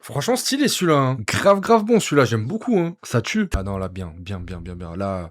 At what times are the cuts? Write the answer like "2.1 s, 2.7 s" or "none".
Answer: 3.6 s